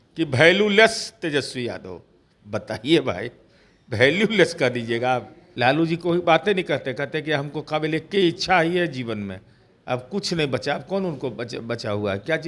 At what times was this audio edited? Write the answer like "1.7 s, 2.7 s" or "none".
5.4 s